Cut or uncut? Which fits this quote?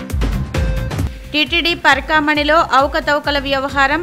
cut